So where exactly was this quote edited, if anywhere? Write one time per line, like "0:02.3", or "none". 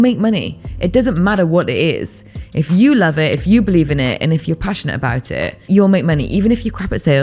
0:05.7